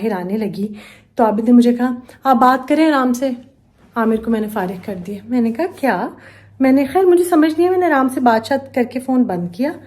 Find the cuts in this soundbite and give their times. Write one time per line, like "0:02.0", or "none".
none